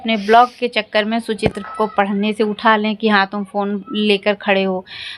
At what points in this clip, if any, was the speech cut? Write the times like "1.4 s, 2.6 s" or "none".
none